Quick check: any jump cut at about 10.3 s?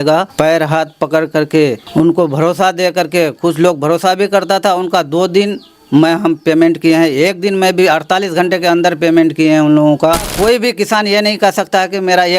yes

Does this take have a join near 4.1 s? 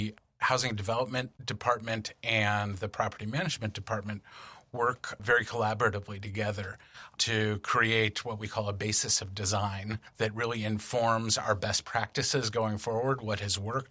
no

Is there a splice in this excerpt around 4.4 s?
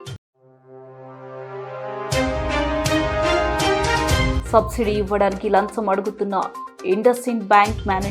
yes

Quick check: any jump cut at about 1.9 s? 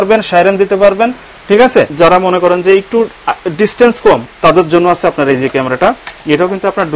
yes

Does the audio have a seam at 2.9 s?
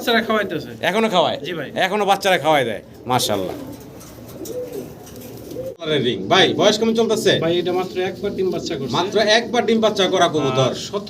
no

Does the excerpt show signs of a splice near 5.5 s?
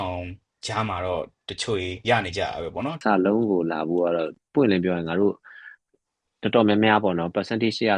no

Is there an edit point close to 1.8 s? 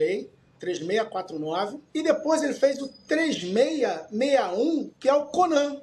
yes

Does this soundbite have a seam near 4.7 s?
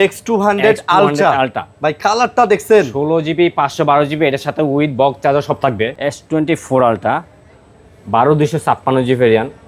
no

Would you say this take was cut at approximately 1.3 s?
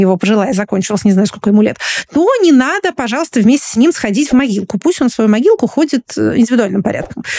no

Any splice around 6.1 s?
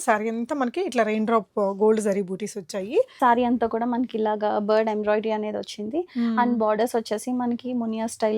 no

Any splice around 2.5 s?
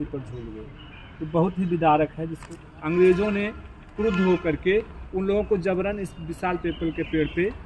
yes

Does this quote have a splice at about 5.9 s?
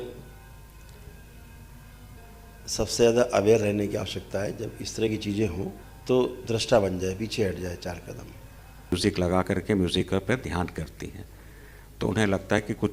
yes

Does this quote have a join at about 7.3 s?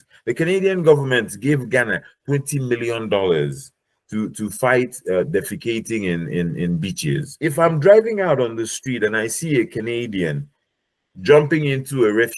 yes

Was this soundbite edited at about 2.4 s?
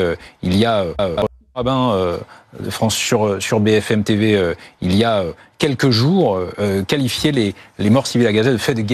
no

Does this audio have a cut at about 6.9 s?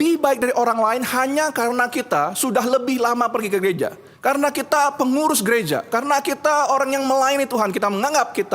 no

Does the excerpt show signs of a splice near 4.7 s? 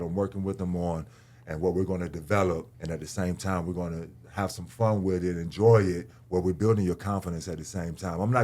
no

